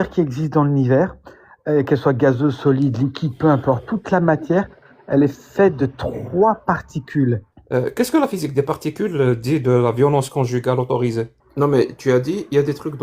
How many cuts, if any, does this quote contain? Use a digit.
2